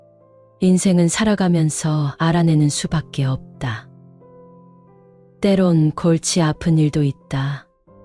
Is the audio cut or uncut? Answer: cut